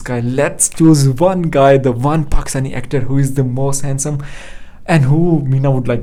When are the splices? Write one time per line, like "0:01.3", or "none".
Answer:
none

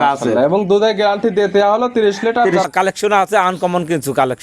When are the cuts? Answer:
0:02.6

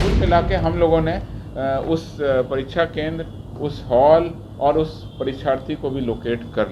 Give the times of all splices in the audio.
none

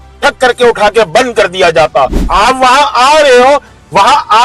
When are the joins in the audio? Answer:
0:02.2

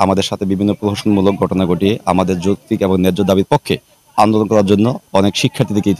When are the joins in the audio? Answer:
none

